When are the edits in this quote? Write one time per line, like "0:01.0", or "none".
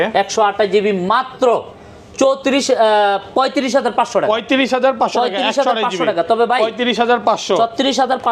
none